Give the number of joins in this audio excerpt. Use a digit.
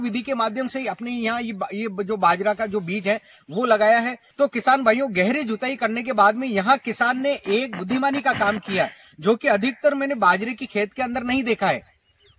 1